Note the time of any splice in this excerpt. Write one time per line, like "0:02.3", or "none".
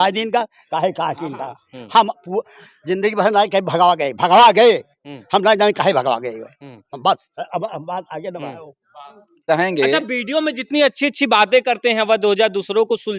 0:09.4